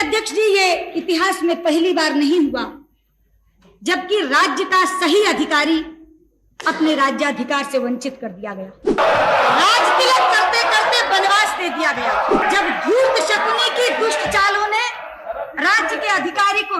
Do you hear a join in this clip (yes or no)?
yes